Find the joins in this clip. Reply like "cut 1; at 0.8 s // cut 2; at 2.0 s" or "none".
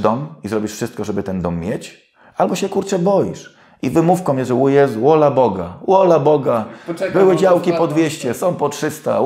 none